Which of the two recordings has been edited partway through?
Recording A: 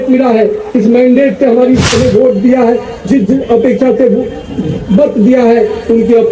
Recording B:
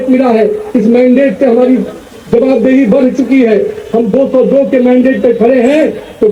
A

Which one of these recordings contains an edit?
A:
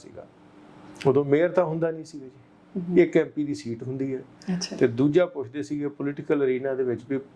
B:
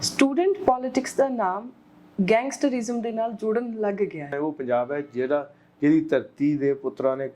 B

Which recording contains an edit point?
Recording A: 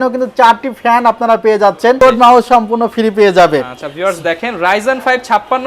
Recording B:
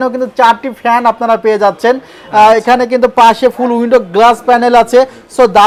A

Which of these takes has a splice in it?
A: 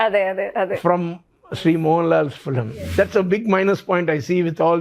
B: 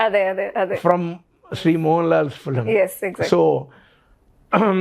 A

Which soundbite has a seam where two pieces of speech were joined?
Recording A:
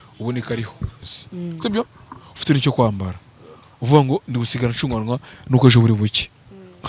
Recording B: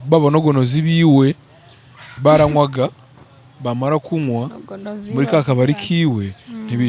A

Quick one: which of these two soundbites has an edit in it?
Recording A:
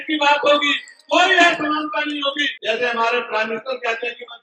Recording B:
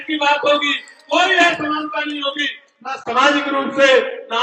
A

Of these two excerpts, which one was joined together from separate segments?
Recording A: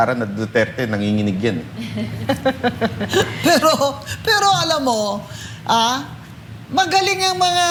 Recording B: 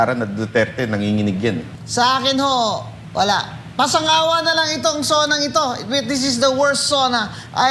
B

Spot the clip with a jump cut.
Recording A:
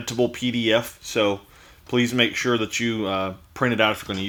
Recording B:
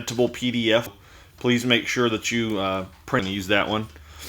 B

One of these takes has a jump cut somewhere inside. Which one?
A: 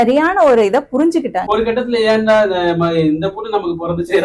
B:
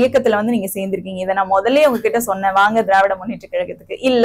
A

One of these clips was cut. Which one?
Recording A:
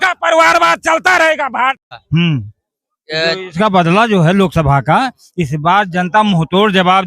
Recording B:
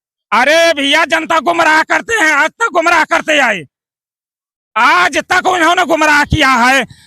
A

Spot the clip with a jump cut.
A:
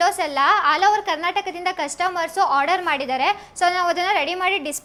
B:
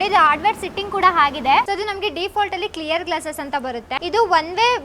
B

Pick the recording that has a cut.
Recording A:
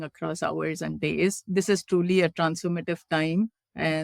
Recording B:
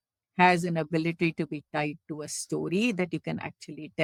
A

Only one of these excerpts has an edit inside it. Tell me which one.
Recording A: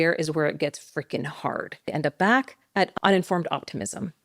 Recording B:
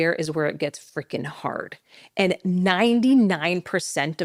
A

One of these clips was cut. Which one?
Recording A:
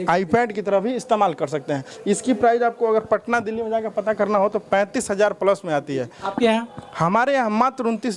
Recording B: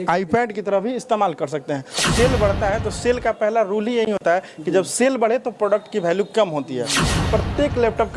B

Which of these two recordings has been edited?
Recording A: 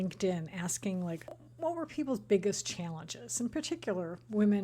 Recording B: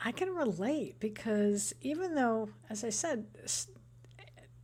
A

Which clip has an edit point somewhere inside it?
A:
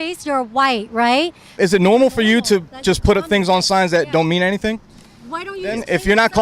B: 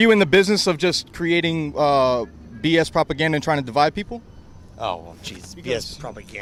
A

